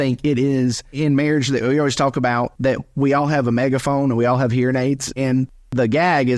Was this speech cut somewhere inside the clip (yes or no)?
yes